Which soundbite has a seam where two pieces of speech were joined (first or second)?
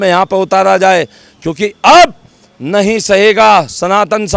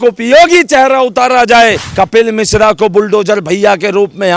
second